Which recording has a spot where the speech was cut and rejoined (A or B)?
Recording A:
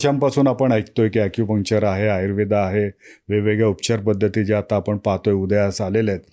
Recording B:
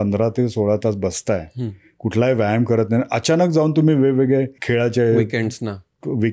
B